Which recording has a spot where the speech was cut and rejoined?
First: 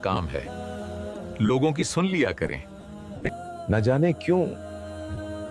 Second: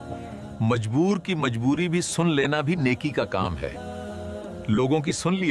first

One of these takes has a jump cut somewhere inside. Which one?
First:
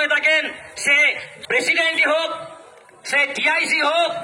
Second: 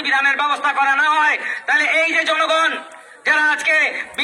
first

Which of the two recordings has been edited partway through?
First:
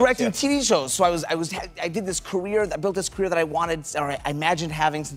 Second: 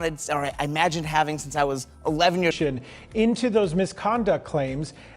second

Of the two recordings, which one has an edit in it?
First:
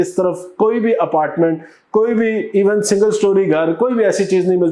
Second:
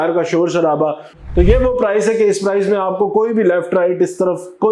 second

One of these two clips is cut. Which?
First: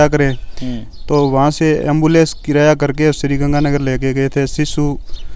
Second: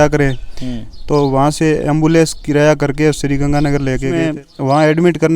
second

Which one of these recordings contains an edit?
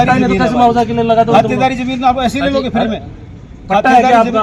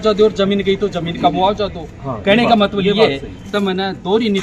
second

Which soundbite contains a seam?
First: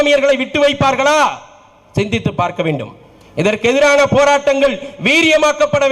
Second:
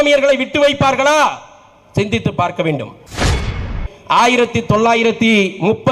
second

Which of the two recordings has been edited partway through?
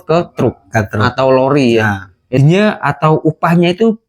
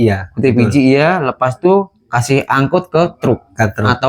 first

